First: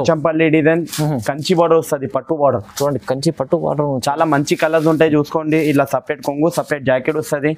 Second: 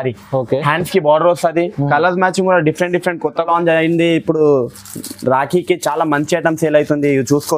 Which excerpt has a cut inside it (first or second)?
second